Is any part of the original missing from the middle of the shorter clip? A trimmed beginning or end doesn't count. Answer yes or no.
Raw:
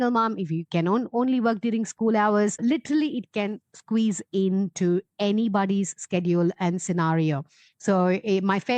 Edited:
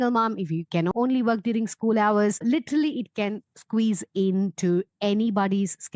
yes